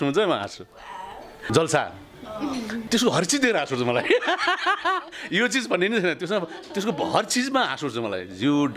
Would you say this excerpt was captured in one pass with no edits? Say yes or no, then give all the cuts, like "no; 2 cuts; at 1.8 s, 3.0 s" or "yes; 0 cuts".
no; 2 cuts; at 1.3 s, 2.8 s